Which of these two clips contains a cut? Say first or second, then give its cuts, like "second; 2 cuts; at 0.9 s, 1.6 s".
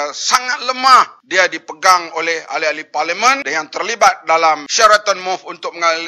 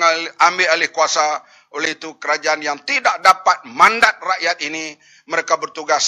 first; 3 cuts; at 1.2 s, 3.4 s, 4.7 s